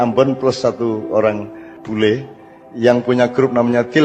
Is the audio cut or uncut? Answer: uncut